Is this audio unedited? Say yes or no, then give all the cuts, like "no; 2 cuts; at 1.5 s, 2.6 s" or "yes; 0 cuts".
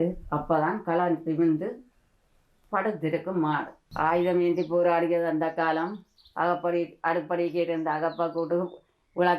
no; 1 cut; at 3.8 s